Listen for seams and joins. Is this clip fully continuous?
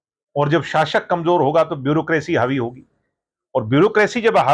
yes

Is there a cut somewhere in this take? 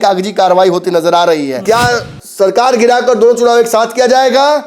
yes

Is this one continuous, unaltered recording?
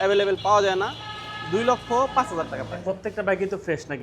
no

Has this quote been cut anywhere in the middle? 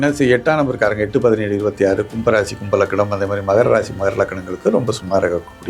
no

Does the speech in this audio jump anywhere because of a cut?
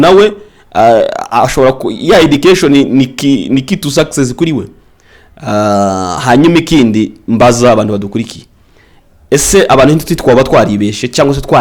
no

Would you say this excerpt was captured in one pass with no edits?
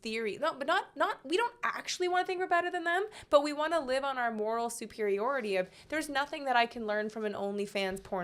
yes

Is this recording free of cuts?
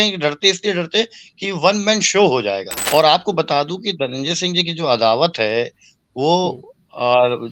no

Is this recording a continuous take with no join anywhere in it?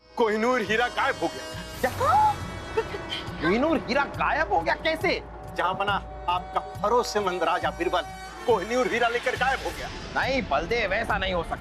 yes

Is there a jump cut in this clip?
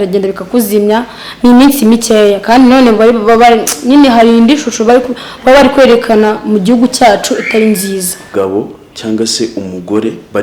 yes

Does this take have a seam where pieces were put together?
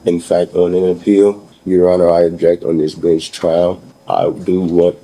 yes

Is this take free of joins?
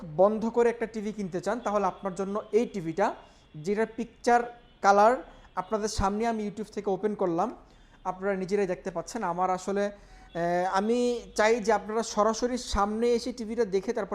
yes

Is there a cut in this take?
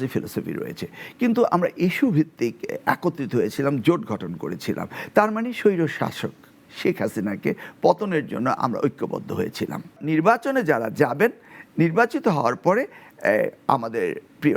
yes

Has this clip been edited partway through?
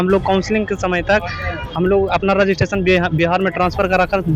no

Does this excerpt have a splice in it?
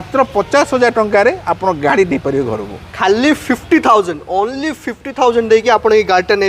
no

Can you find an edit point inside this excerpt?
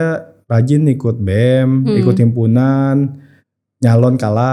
no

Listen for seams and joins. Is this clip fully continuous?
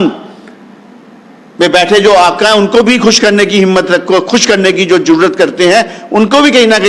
yes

